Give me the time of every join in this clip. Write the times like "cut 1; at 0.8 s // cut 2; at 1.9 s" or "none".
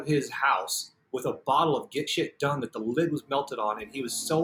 none